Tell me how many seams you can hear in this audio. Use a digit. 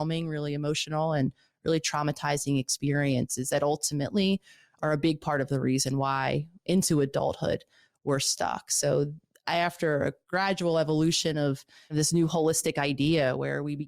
1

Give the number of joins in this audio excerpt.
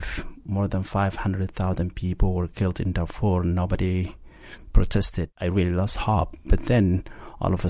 1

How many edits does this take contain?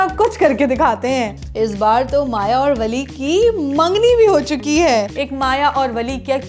2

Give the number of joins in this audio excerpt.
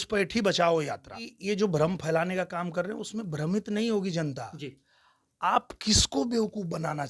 1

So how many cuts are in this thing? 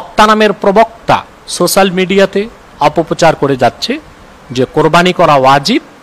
2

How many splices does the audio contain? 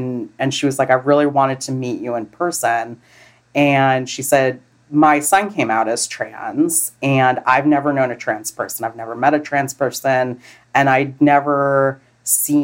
1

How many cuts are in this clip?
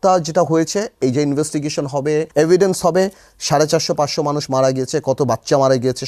1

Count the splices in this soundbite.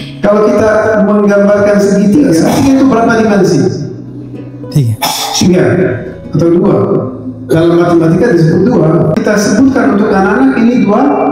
2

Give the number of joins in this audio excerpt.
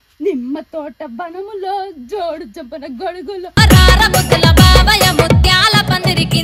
0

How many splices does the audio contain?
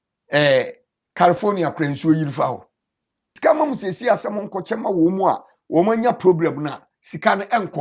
1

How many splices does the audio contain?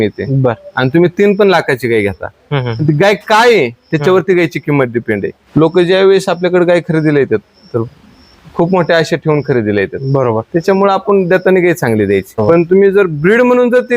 2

